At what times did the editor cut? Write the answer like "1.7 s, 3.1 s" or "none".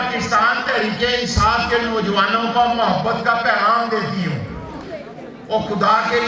4.8 s